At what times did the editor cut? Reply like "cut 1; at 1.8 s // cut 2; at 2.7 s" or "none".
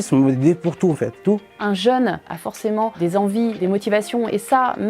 cut 1; at 1.4 s // cut 2; at 2.3 s